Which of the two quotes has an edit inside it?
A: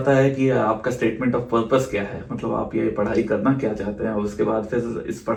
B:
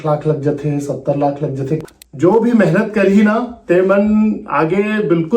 B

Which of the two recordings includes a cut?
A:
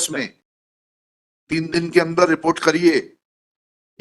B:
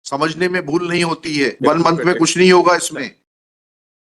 B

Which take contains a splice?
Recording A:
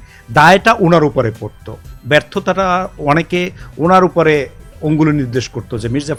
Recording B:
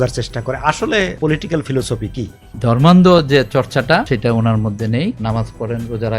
B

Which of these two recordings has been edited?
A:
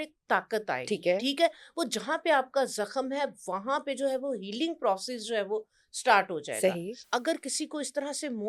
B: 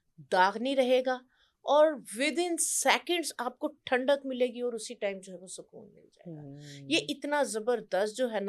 A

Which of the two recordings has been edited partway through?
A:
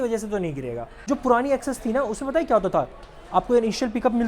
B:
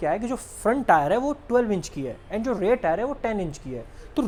A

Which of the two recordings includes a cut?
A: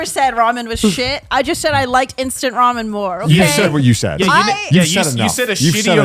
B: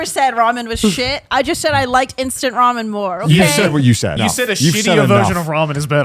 B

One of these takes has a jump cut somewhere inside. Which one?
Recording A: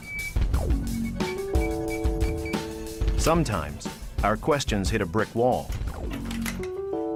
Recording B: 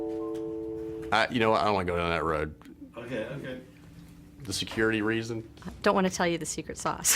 B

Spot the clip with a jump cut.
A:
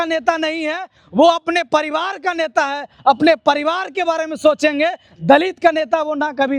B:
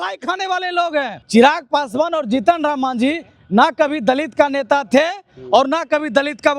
B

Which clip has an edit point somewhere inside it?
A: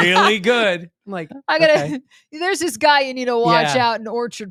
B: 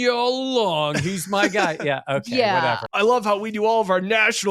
B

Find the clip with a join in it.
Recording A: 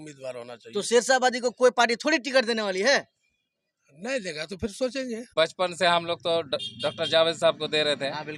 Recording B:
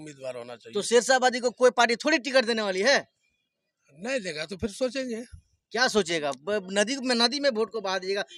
A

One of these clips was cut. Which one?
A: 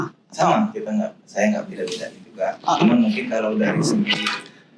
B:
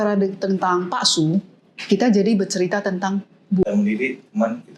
B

